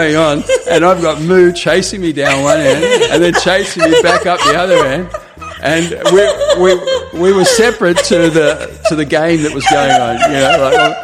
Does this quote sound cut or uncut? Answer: uncut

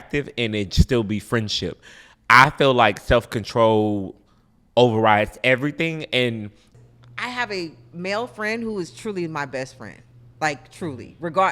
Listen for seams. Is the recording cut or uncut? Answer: cut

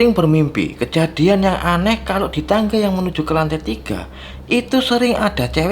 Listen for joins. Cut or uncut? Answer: uncut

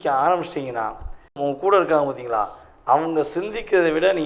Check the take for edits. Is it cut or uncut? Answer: cut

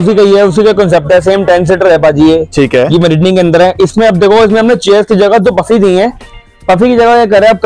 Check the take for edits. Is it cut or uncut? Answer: uncut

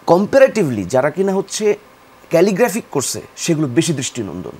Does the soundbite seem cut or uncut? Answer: uncut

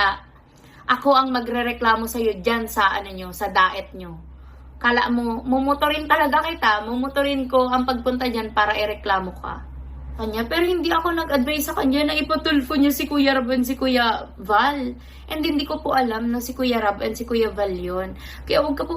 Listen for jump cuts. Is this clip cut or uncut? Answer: cut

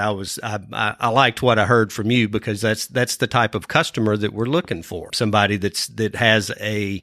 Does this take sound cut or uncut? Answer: cut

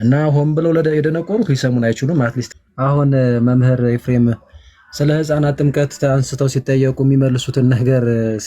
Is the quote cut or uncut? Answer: cut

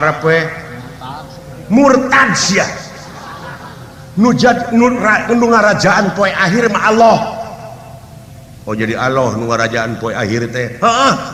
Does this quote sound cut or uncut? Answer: uncut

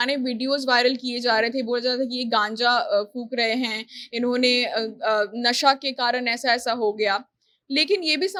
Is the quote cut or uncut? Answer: uncut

